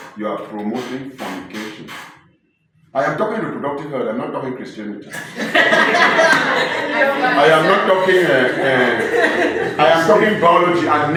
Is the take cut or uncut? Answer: uncut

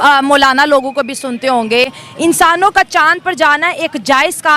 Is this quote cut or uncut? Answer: uncut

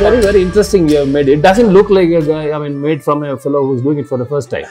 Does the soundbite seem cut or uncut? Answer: uncut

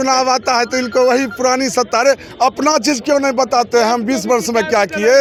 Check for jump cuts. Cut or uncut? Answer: uncut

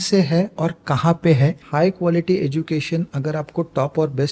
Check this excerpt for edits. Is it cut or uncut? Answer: cut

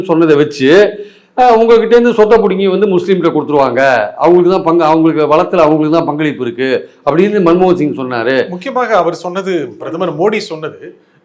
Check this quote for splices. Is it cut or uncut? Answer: uncut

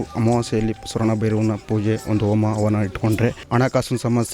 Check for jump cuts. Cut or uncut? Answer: cut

